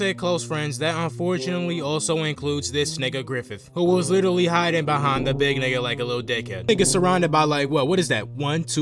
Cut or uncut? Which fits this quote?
cut